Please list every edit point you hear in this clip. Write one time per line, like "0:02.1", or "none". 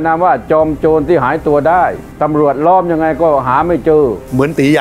none